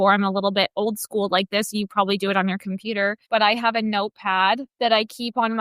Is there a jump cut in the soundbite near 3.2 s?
yes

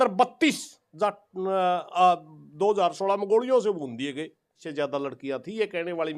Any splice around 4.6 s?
yes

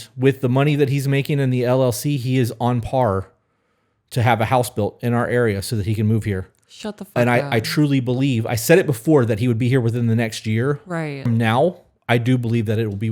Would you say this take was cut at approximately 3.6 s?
no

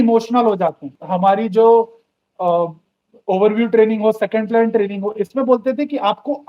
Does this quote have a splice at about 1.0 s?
yes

